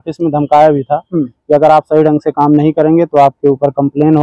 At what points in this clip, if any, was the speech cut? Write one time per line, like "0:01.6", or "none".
none